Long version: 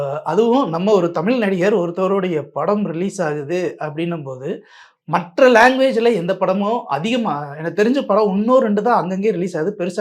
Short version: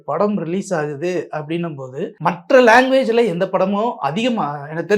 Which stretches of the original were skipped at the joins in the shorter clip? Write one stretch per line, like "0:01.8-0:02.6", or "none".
0:04.6-0:05.0